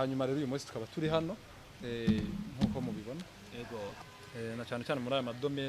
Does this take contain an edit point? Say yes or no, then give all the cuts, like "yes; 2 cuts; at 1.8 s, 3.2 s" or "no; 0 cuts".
yes; 1 cut; at 4.0 s